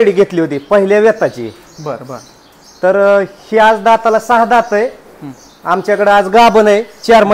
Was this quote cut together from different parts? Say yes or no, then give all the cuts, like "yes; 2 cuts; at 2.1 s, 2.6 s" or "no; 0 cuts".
no; 0 cuts